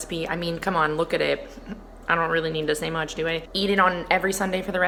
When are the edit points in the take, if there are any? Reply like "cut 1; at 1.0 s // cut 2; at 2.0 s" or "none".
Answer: none

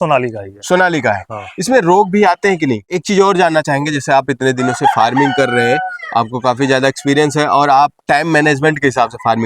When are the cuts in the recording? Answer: cut 1; at 3.0 s

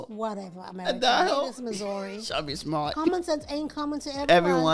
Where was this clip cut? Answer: cut 1; at 1.5 s

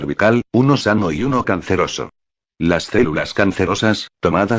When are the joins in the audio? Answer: cut 1; at 2.6 s

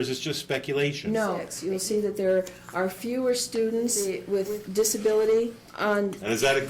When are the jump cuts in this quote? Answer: cut 1; at 1.5 s // cut 2; at 4.1 s // cut 3; at 5.6 s

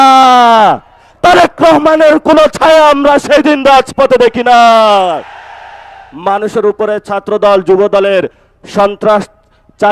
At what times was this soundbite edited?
cut 1; at 1.1 s // cut 2; at 6.0 s

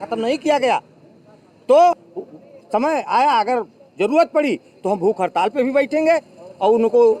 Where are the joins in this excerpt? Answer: cut 1; at 2.0 s

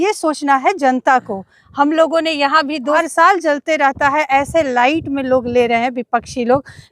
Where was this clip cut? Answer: cut 1; at 3.0 s

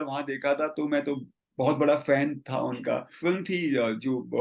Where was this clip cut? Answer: cut 1; at 3.2 s

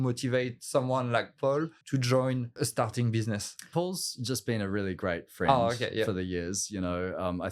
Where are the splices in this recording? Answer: cut 1; at 1.8 s // cut 2; at 3.7 s

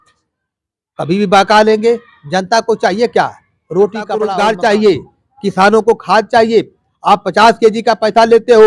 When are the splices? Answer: cut 1; at 4.1 s

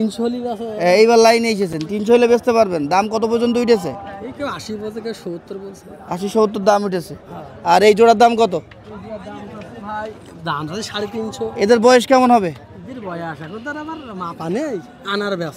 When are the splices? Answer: none

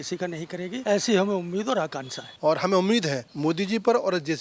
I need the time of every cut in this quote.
cut 1; at 0.8 s // cut 2; at 2.2 s // cut 3; at 3.3 s

